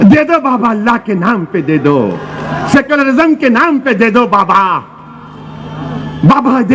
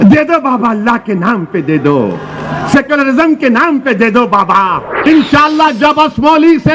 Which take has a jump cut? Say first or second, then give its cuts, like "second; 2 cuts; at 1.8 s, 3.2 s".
second; 1 cut; at 4.9 s